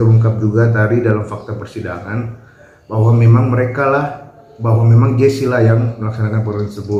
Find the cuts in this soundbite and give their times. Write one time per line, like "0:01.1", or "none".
none